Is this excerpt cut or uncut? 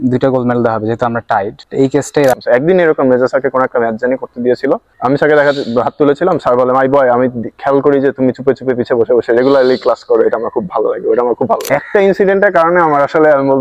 cut